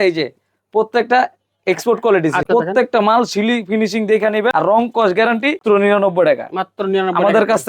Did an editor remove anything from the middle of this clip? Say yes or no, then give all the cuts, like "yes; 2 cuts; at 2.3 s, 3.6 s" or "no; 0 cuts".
yes; 3 cuts; at 2.5 s, 4.5 s, 5.6 s